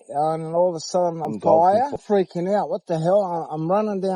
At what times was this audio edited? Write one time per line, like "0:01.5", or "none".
0:01.2
0:02.0